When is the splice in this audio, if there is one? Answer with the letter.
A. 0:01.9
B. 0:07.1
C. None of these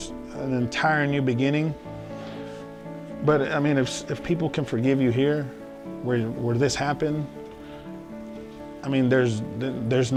C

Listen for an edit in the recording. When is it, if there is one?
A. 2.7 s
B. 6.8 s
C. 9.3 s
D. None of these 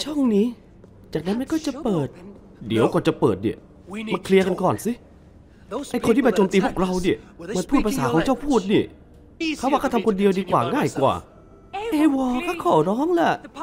C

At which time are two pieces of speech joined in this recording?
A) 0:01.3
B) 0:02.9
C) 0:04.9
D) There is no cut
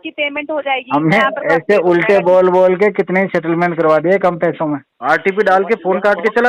C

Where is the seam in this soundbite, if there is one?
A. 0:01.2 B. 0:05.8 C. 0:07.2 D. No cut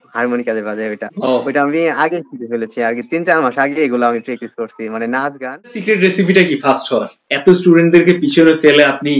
B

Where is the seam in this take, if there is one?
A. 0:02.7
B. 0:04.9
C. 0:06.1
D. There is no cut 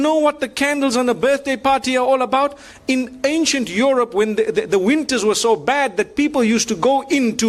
D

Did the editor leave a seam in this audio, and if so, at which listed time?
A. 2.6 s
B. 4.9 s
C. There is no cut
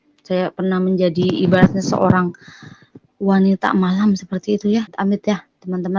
B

